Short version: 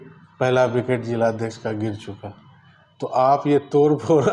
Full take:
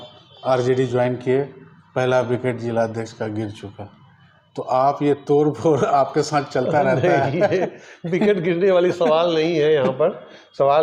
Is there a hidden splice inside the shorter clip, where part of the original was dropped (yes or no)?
no